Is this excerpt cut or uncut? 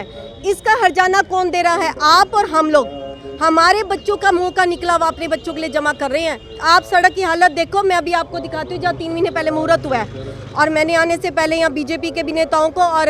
uncut